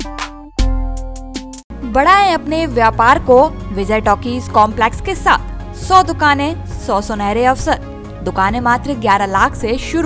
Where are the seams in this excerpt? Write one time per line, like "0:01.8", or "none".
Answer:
none

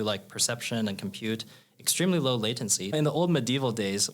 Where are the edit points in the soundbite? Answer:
0:02.9

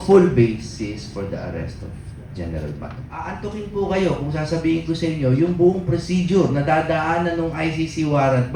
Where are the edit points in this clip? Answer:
0:03.3

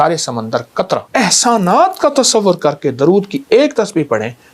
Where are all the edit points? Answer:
0:01.1

